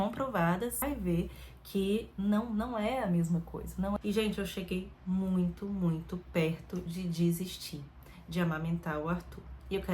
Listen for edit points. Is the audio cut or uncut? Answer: cut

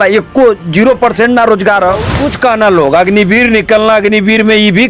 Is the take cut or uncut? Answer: cut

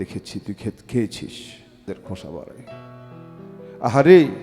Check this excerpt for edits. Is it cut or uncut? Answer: cut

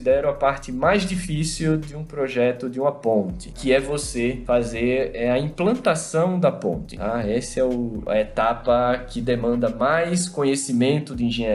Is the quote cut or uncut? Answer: uncut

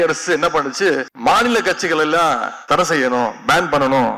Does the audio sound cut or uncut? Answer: cut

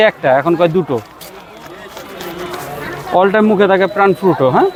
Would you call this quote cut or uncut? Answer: uncut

